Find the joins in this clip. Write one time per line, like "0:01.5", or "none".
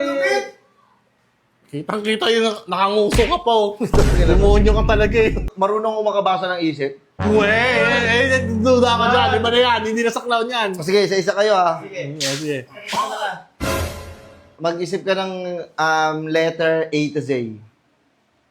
0:05.5

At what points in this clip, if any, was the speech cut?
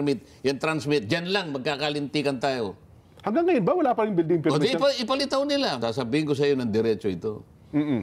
0:05.8

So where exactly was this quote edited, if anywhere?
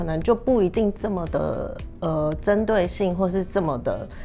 none

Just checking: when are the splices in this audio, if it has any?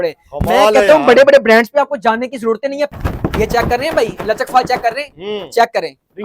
0:02.9

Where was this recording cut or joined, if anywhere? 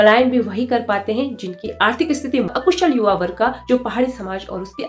0:02.5

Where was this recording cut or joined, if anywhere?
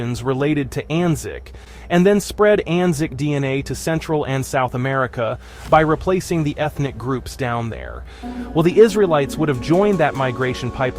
0:08.2

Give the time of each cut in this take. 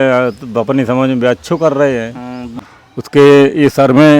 0:02.5

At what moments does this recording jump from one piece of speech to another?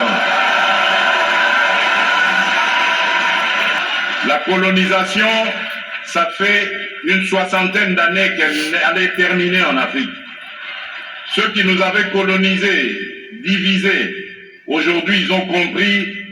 0:03.8

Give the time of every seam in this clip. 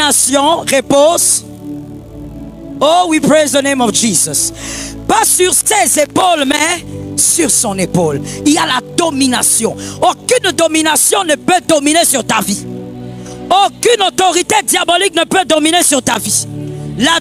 none

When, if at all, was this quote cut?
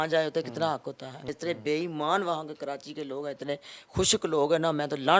0:01.3

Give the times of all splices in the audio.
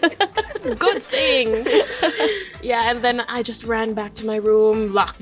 none

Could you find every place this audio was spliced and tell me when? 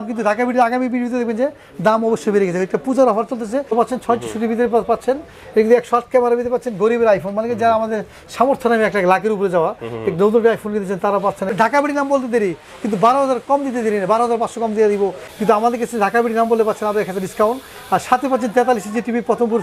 0:03.7
0:11.5
0:15.2

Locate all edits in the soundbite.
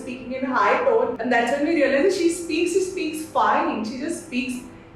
0:01.2

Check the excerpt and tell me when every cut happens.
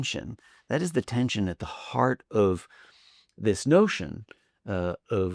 none

